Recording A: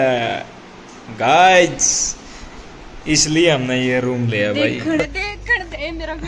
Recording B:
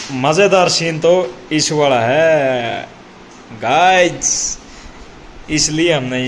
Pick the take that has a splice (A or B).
A